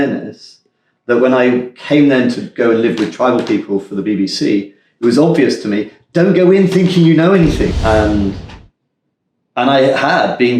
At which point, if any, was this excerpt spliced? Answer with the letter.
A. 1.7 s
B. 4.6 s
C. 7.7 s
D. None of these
C